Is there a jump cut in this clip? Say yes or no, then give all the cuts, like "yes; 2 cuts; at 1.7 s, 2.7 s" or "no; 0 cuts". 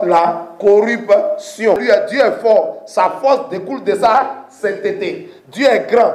yes; 1 cut; at 1.8 s